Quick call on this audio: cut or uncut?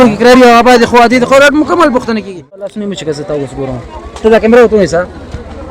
cut